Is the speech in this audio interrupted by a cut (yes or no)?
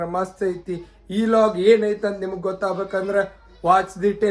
no